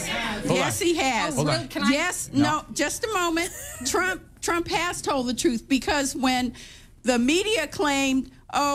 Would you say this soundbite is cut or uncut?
uncut